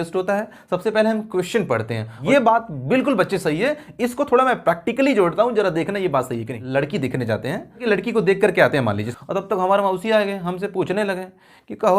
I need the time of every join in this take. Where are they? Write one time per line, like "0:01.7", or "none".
0:02.1
0:06.6
0:07.8
0:09.1